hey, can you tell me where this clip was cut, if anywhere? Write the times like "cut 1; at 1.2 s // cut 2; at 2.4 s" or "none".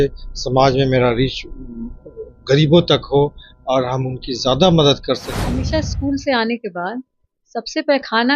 cut 1; at 5.4 s

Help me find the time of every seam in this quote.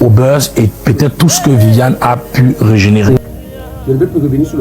cut 1; at 3.2 s

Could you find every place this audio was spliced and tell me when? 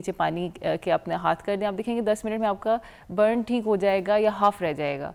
none

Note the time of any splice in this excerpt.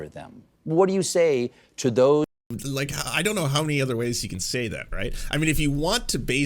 cut 1; at 2.4 s

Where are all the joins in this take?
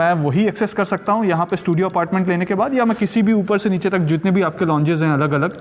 none

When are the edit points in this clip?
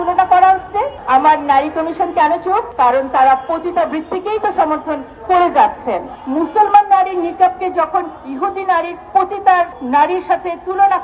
cut 1; at 6.1 s

